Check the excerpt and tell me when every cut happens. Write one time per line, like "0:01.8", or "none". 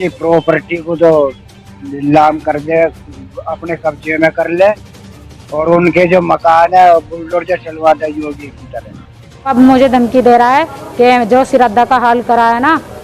0:09.5